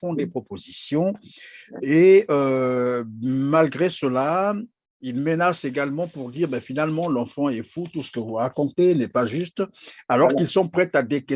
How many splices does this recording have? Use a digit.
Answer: 0